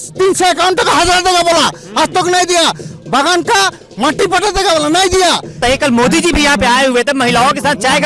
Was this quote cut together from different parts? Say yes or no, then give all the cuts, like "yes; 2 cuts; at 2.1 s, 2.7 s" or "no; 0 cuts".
yes; 1 cut; at 5.6 s